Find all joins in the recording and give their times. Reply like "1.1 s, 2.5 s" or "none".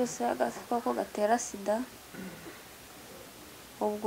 none